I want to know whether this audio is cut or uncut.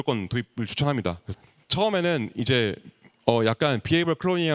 cut